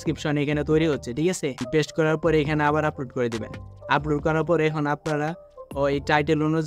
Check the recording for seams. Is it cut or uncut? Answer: cut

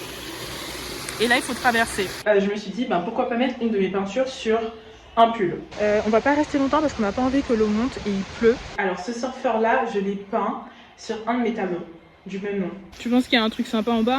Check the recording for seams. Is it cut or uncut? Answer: cut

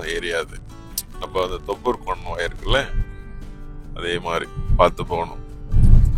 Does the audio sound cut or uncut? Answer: uncut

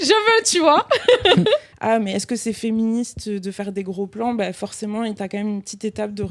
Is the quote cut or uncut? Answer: cut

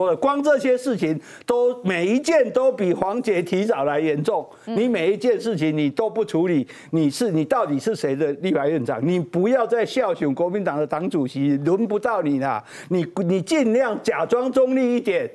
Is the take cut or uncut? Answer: uncut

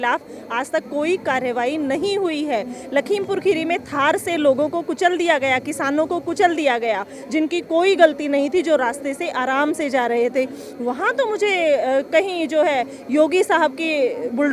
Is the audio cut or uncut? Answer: uncut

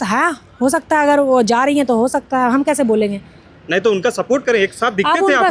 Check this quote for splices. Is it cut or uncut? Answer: uncut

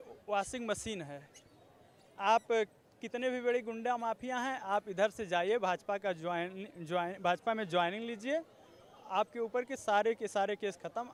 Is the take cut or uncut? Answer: uncut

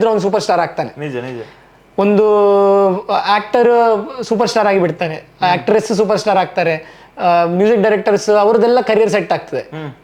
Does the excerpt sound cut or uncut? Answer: uncut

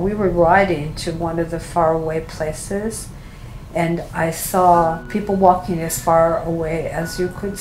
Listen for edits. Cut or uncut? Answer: cut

